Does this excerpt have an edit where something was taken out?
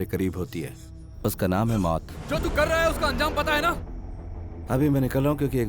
yes; 2 cuts; at 2.1 s, 3.8 s

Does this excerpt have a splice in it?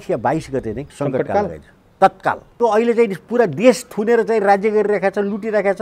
yes; 2 cuts; at 0.9 s, 2.6 s

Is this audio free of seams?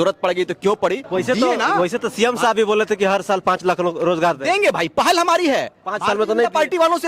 no; 1 cut; at 1.0 s

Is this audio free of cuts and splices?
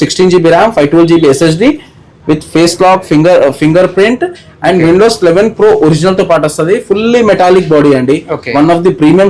yes; 0 cuts

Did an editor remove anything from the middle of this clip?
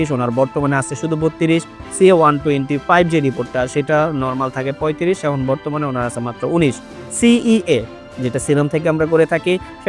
no; 0 cuts

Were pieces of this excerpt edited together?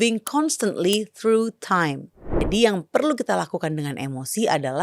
yes; 1 cut; at 2.4 s

